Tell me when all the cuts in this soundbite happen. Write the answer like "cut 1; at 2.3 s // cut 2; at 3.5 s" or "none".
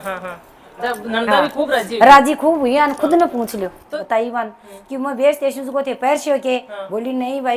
cut 1; at 3.8 s